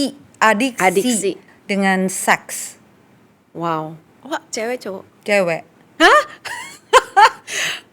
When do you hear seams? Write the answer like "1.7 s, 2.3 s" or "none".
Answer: 1.4 s